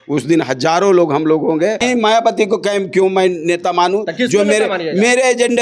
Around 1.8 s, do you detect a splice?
yes; 1 cut; at 1.8 s

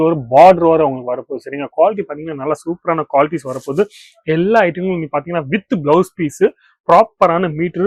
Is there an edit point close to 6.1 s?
no; 0 cuts

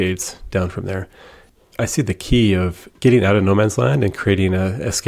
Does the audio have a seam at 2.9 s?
yes; 2 cuts; at 1.4 s, 2.9 s

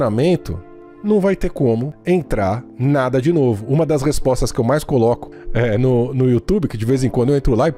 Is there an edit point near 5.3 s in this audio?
no; 0 cuts

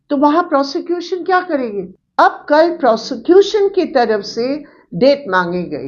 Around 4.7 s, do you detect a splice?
no; 1 cut; at 1.9 s

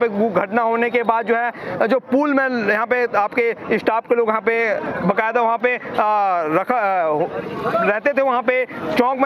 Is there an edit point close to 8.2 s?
no; 0 cuts

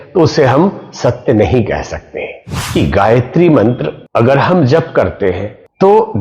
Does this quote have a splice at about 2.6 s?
yes; 1 cut; at 2.6 s

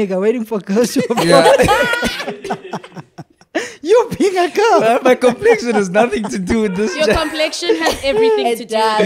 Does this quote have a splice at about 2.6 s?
no; 0 cuts

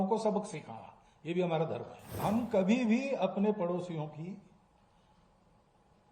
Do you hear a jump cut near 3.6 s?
no; 1 cut; at 2.2 s

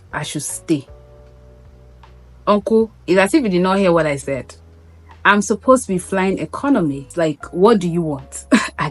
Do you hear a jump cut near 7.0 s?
yes; 1 cut; at 7.0 s

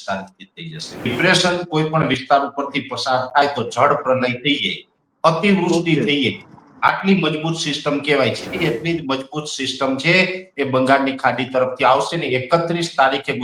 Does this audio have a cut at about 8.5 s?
yes; 2 cuts; at 1.1 s, 8.5 s

